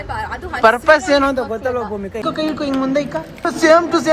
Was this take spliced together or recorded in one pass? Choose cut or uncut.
cut